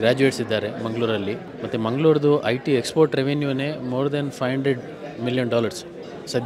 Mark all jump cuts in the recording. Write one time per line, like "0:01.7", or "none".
0:01.5